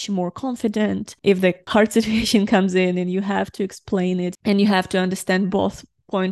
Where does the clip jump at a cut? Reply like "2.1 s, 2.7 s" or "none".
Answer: 1.6 s